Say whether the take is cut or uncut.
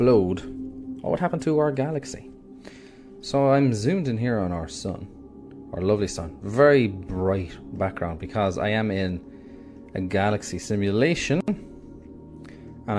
uncut